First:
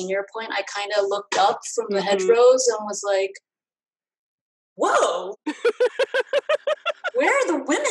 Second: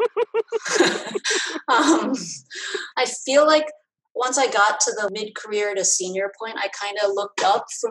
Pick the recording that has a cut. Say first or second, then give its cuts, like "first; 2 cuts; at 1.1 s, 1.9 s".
second; 2 cuts; at 2.8 s, 5.1 s